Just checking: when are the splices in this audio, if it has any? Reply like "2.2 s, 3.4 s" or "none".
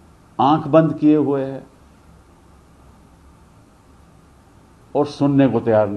none